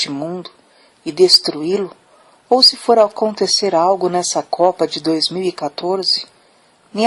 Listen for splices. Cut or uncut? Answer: cut